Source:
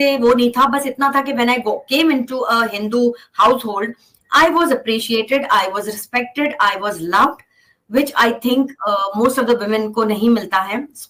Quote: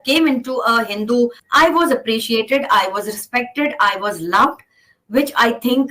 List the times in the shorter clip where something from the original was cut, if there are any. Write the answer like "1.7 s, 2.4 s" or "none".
1.4 s